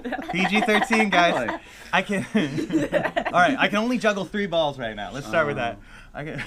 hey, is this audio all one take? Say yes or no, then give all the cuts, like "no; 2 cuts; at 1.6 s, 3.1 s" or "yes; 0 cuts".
yes; 0 cuts